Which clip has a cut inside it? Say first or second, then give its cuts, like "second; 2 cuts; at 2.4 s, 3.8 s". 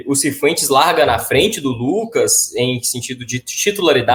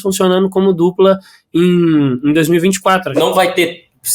second; 1 cut; at 3.1 s